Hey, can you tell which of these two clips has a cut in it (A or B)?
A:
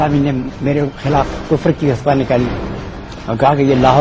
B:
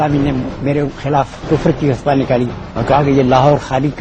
B